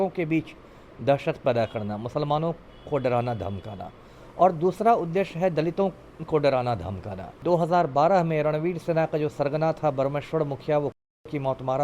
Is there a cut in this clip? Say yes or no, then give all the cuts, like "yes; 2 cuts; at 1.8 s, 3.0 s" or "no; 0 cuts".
yes; 1 cut; at 7.4 s